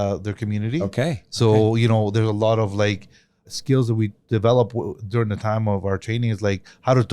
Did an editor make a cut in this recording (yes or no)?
yes